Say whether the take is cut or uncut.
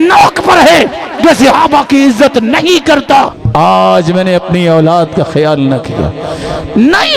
cut